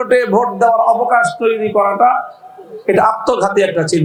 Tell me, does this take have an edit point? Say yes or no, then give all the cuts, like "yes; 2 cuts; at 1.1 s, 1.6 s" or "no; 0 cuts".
no; 0 cuts